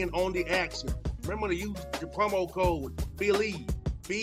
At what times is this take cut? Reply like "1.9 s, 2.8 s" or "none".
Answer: none